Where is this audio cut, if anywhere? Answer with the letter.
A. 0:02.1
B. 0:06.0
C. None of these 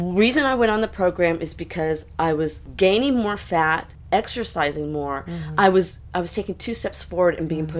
C